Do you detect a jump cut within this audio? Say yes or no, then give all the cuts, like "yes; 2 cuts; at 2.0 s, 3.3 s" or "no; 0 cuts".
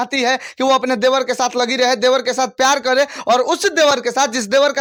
no; 0 cuts